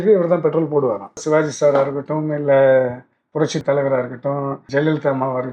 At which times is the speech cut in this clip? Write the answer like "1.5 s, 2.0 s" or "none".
1.2 s, 3.6 s, 4.6 s